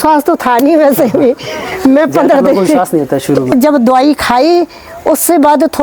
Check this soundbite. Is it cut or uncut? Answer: cut